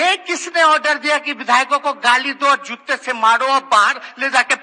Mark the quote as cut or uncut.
uncut